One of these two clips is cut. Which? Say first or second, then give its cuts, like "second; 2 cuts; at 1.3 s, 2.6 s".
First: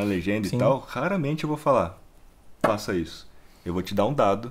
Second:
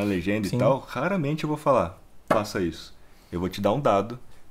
second; 1 cut; at 2.1 s